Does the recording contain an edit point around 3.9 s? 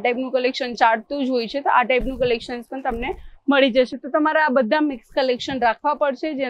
no; 0 cuts

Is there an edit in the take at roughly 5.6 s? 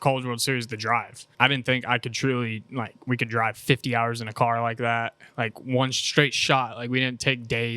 no; 1 cut; at 1.2 s

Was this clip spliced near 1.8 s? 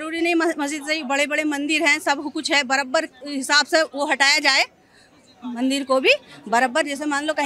no; 0 cuts

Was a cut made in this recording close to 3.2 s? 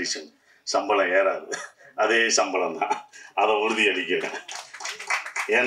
no; 0 cuts

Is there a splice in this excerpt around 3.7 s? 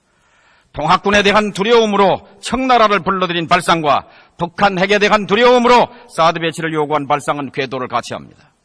yes; 1 cut; at 3.7 s

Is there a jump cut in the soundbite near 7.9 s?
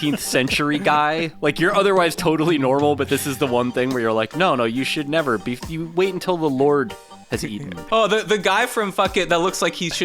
yes; 1 cut; at 7.9 s

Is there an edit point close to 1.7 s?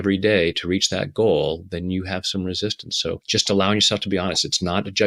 no; 1 cut; at 3.2 s

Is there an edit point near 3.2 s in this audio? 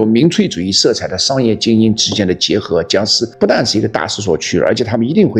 yes; 1 cut; at 3.2 s

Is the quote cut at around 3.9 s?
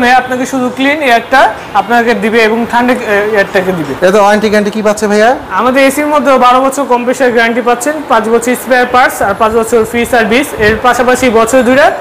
yes; 1 cut; at 3.9 s

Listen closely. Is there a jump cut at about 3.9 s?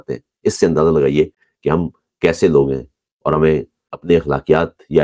yes; 1 cut; at 3.9 s

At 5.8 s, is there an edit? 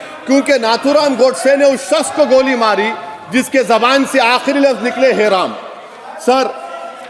no; 0 cuts

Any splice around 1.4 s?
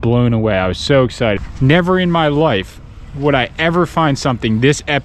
yes; 1 cut; at 1.4 s

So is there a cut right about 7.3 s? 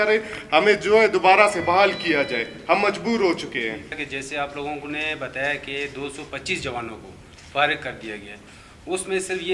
no; 1 cut; at 4.0 s

